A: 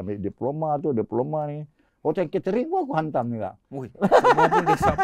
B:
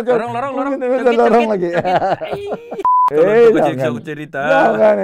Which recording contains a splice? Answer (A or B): B